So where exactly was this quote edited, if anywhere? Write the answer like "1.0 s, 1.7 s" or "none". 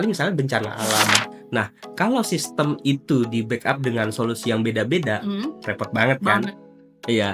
1.3 s